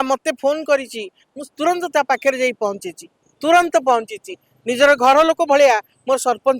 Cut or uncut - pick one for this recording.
uncut